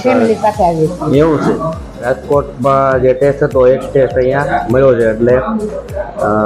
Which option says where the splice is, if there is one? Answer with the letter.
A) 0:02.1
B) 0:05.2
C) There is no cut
A